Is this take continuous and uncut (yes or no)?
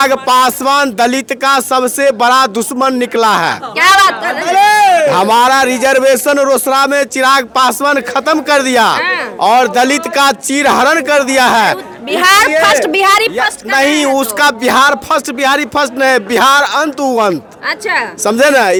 yes